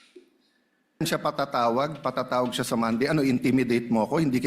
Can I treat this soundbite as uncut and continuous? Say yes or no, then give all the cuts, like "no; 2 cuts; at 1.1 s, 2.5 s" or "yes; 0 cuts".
no; 1 cut; at 1.0 s